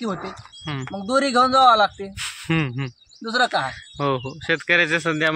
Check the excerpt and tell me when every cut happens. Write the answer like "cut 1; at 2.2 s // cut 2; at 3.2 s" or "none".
none